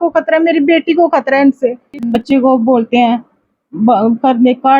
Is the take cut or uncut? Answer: cut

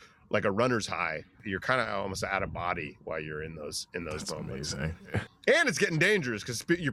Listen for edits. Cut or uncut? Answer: cut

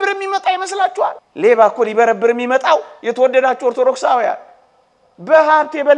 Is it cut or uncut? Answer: cut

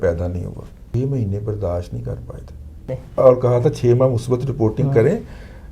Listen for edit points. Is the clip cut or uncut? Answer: cut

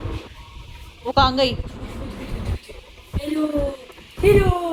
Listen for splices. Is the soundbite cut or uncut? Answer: uncut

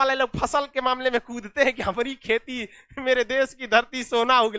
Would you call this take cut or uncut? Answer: uncut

